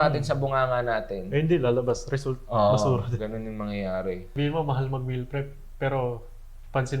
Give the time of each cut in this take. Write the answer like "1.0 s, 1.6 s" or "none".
4.3 s